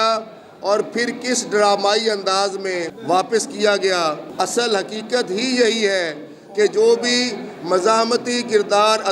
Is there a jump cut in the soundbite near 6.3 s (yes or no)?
no